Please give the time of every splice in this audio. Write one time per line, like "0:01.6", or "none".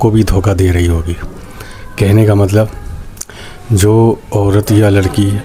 none